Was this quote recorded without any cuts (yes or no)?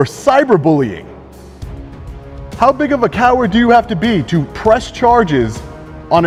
yes